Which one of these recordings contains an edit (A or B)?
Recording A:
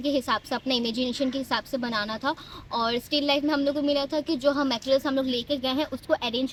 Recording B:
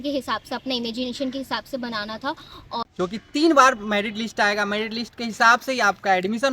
B